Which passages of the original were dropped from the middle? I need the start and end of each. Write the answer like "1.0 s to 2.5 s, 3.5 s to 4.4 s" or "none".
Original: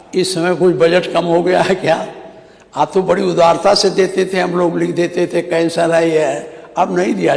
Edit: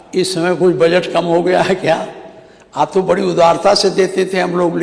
none